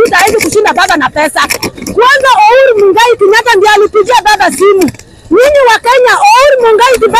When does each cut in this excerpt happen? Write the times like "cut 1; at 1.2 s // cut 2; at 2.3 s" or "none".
cut 1; at 1.7 s